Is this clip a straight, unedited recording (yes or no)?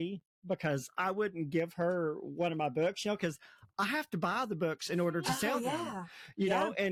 yes